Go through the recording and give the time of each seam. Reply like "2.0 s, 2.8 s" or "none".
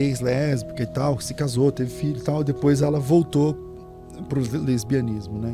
none